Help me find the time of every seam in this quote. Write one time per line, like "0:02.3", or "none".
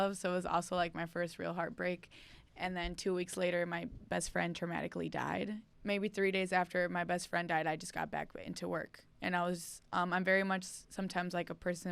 0:05.6